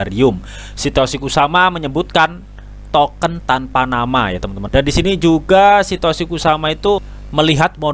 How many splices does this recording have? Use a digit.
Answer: 1